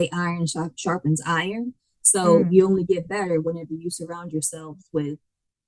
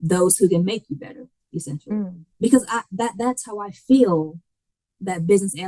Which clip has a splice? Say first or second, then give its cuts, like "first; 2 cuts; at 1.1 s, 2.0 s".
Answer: second; 1 cut; at 2.2 s